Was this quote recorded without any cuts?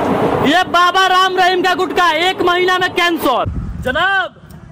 no; 1 cut; at 3.5 s

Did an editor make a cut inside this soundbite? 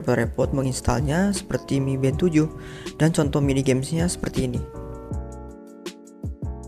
no; 0 cuts

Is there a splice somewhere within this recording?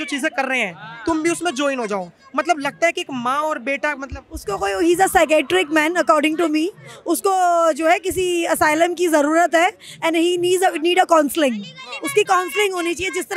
no; 0 cuts

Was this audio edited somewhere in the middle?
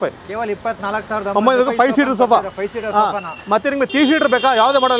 no; 0 cuts

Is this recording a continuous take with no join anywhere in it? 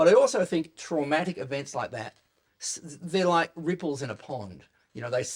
yes; 0 cuts

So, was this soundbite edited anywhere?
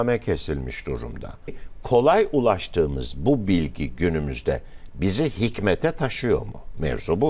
yes; 1 cut; at 1.6 s

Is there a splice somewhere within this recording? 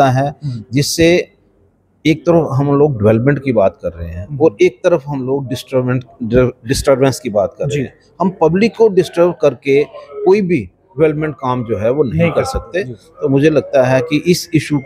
no; 0 cuts

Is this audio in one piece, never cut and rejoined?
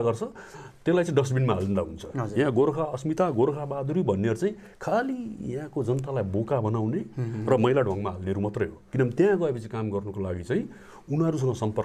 yes; 0 cuts

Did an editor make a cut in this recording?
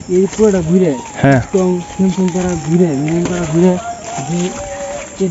no; 0 cuts

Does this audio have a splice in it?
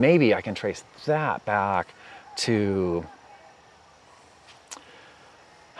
no; 0 cuts

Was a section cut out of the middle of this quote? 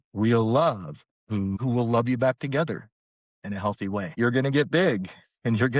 yes; 2 cuts; at 1.6 s, 4.1 s

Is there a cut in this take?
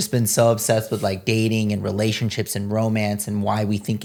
no; 0 cuts

